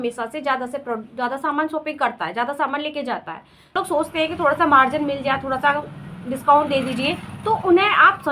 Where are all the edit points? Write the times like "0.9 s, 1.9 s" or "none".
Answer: 3.8 s